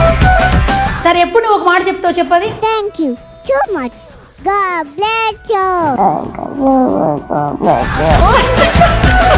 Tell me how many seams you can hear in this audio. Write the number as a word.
one